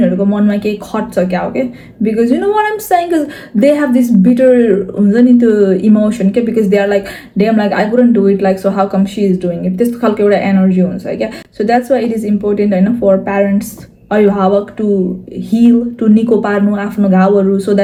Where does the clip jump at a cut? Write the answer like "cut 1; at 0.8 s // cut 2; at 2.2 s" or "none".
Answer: none